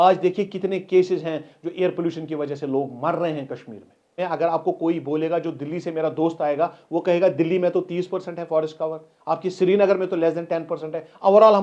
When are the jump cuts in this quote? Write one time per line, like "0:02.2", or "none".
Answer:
0:04.2